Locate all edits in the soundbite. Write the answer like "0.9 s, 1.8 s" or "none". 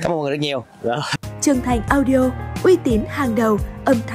1.1 s